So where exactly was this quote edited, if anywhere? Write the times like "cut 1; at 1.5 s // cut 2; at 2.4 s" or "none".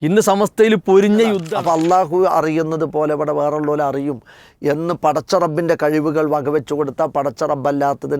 cut 1; at 1.5 s